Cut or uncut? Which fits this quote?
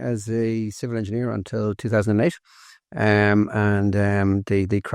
uncut